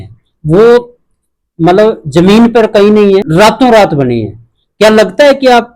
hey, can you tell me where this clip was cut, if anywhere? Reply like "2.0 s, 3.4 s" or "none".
3.3 s